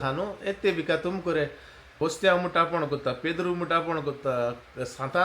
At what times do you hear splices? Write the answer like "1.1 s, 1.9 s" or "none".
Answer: 2.0 s